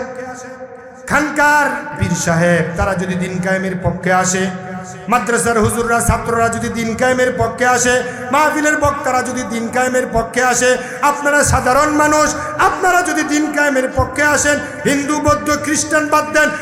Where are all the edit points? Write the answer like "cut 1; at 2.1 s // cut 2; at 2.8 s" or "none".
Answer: cut 1; at 2.0 s